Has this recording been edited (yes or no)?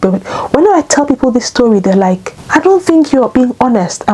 yes